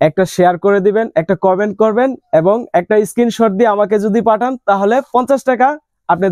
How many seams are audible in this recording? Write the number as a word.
zero